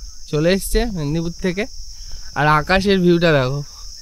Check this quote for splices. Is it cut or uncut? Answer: uncut